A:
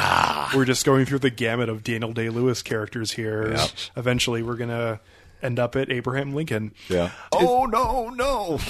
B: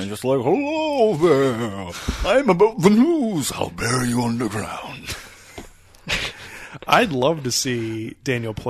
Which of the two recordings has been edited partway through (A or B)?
A